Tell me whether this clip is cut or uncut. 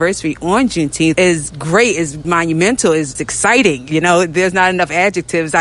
cut